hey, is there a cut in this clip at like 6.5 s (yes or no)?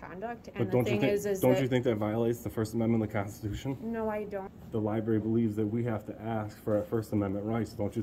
no